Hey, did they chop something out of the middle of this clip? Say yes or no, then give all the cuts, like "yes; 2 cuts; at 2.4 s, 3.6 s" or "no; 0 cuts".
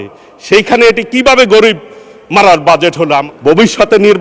yes; 1 cut; at 3.3 s